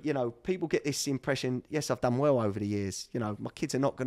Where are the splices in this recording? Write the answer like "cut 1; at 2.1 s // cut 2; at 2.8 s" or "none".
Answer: none